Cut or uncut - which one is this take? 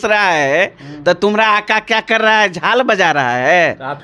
uncut